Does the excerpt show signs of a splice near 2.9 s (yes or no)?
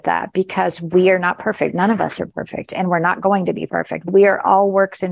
no